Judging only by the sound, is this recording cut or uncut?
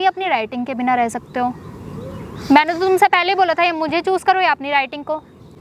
uncut